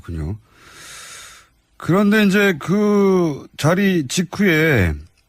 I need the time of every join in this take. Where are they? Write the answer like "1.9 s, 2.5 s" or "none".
3.6 s